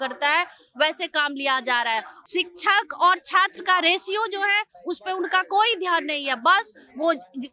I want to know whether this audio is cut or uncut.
cut